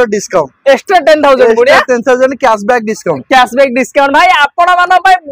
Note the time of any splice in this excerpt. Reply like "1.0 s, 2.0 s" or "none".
none